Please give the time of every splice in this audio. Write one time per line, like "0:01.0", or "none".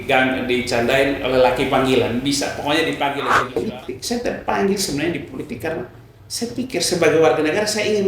0:03.5